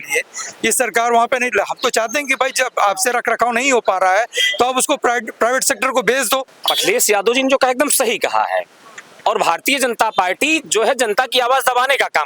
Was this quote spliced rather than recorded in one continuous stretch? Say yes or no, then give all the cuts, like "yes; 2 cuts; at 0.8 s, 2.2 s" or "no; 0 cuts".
yes; 1 cut; at 6.5 s